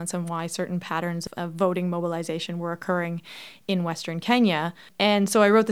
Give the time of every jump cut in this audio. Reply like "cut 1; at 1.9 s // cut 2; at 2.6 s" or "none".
cut 1; at 1.2 s // cut 2; at 4.8 s